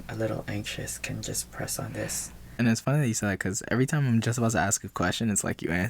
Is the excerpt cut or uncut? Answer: cut